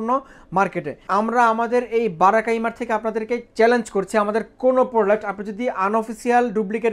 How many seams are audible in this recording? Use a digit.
1